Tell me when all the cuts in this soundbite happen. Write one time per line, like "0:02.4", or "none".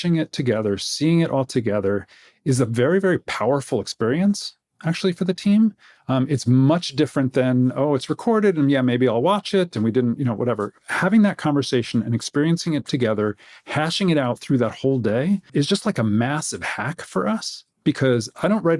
0:15.5